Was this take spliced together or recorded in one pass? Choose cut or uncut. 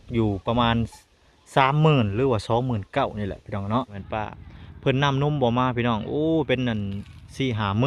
cut